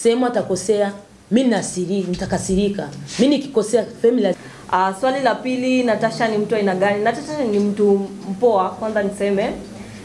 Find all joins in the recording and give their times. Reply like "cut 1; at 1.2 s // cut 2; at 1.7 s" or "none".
cut 1; at 4.4 s